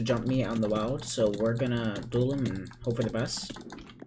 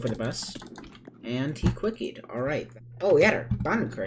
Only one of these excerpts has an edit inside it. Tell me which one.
second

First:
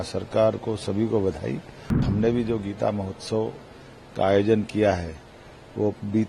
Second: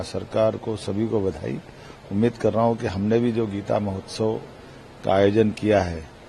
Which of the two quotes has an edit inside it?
first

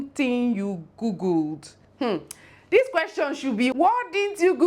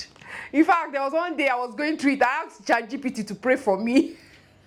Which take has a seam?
first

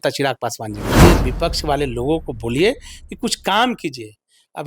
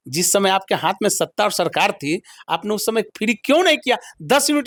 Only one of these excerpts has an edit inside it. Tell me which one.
first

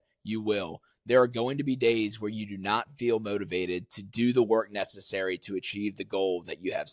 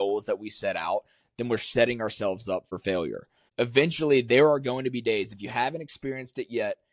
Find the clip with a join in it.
second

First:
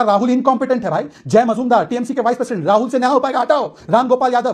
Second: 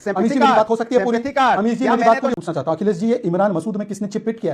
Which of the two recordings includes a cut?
second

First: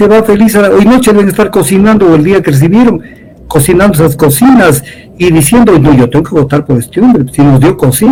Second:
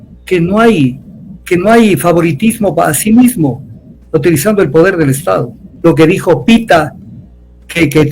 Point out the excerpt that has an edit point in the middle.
second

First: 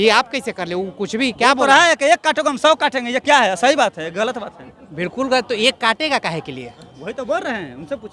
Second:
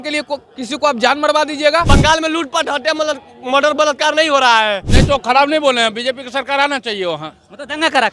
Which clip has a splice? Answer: second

